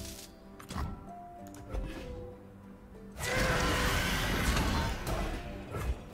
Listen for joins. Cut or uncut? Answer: uncut